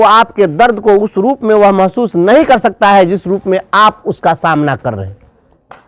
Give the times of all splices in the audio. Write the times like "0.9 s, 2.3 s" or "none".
none